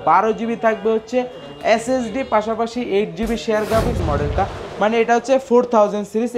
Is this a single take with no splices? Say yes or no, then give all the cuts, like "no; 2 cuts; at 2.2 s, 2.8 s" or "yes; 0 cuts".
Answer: no; 1 cut; at 4.0 s